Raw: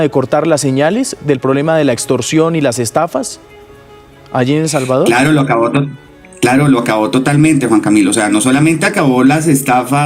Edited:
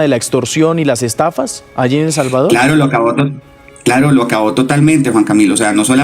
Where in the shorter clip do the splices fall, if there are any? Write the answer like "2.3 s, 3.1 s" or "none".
1.6 s

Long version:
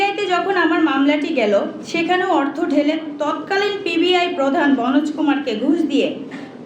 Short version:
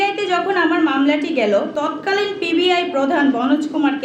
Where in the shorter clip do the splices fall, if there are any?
1.7 s

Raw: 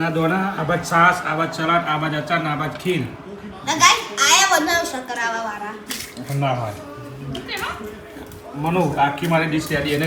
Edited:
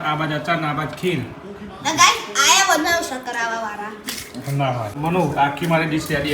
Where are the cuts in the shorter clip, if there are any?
4.9 s

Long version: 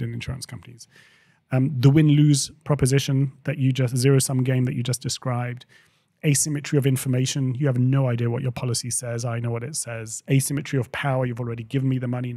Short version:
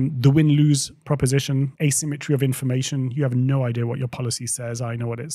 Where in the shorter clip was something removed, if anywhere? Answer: 1.7 s

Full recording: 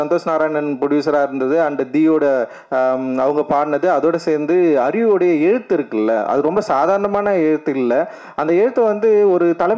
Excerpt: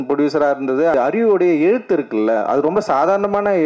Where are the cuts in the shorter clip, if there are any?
0.9 s

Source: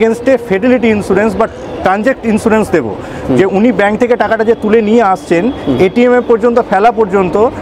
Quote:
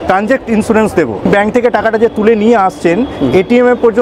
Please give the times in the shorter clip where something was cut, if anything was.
1.3 s

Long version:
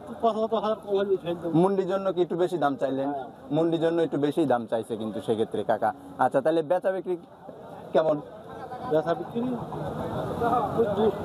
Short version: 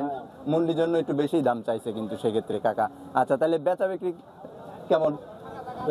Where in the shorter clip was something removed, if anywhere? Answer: none

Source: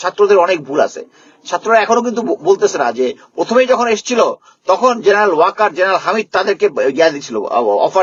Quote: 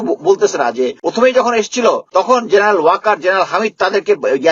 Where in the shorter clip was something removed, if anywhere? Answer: 1.0 s, 2.0 s

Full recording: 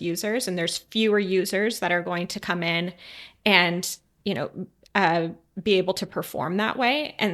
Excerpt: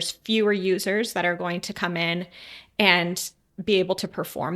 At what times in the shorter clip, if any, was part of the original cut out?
3.4 s

